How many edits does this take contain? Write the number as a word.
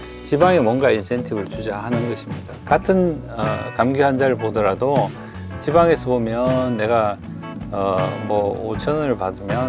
one